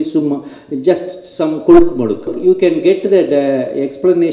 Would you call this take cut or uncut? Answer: cut